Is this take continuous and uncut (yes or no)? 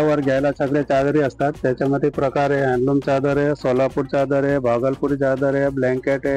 yes